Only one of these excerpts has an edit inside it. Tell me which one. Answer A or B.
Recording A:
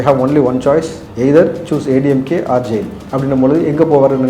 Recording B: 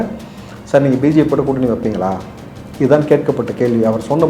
A